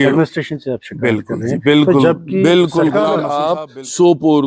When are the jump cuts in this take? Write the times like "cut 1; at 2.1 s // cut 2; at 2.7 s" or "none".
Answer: cut 1; at 3.3 s